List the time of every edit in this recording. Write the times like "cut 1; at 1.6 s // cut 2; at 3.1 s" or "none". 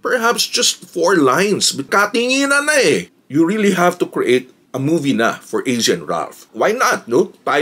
cut 1; at 1.9 s // cut 2; at 3.1 s // cut 3; at 6.5 s